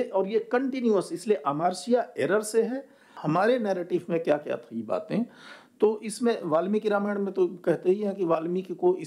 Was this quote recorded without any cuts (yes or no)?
no